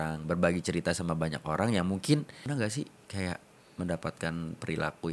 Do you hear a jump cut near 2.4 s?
yes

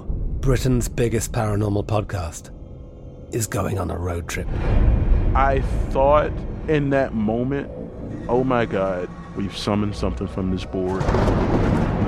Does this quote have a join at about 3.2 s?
no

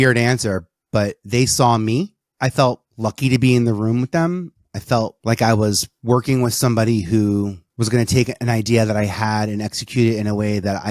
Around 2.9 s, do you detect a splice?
yes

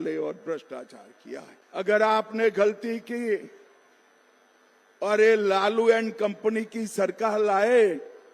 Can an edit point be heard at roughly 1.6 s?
yes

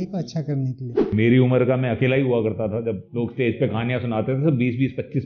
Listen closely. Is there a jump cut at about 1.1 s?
yes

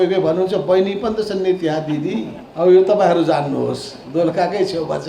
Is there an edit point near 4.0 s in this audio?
no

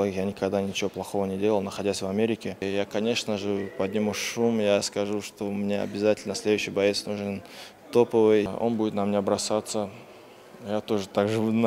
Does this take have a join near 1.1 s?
no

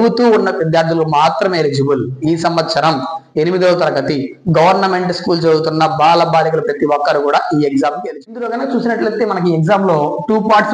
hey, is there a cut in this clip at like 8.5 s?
yes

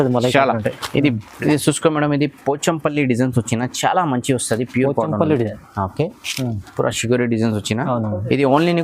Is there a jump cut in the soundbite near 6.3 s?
no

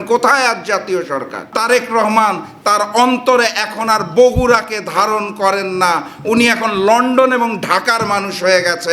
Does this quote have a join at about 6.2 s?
no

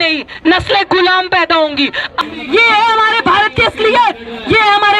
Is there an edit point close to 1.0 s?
no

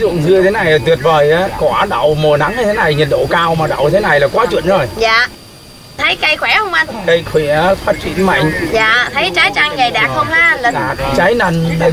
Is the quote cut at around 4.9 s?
no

